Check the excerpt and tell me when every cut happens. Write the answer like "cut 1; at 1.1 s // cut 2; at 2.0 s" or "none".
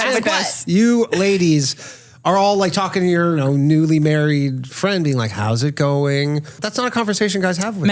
cut 1; at 3.4 s // cut 2; at 6.6 s